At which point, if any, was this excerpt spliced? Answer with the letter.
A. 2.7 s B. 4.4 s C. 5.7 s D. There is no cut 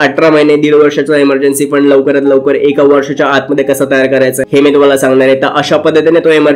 B